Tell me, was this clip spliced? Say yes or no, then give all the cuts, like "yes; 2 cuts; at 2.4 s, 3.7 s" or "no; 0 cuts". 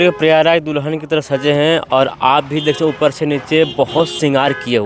no; 0 cuts